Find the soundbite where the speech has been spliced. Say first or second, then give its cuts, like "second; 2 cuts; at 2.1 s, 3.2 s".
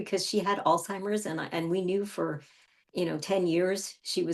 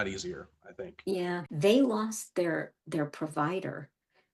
second; 1 cut; at 1.5 s